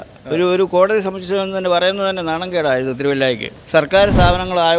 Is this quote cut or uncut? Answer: cut